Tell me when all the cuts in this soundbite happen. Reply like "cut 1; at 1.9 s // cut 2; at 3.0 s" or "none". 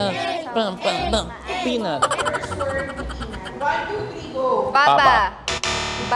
cut 1; at 2.2 s